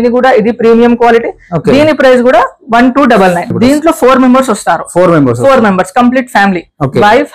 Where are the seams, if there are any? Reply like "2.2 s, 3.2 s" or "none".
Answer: 3.5 s